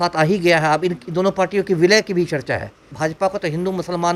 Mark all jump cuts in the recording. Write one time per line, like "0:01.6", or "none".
0:02.9